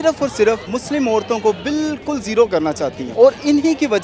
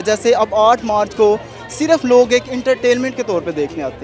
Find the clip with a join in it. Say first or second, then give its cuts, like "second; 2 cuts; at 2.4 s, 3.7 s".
first; 1 cut; at 3.0 s